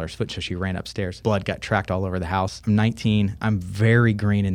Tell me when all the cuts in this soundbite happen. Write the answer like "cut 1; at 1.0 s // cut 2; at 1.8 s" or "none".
cut 1; at 1.1 s // cut 2; at 2.6 s // cut 3; at 3.4 s